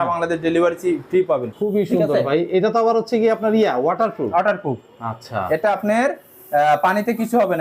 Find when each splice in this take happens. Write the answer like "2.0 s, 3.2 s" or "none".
1.3 s